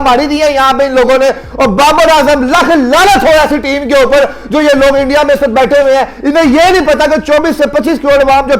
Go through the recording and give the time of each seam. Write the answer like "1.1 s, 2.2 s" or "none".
none